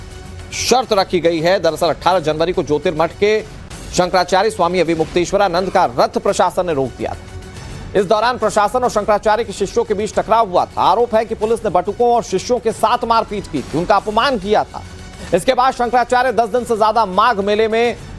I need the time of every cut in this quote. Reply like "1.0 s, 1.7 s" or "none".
none